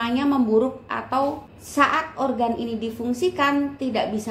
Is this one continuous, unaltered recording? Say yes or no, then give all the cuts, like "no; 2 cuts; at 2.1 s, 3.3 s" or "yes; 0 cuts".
no; 1 cut; at 1.5 s